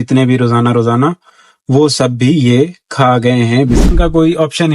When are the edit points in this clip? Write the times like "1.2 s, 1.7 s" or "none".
3.8 s